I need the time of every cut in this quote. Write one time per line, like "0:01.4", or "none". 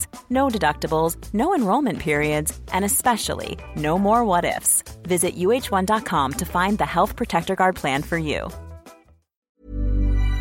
0:09.5